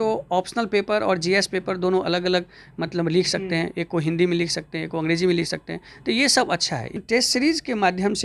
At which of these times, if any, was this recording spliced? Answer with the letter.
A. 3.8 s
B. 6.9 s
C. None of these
B